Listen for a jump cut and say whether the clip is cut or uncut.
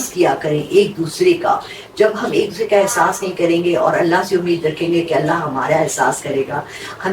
uncut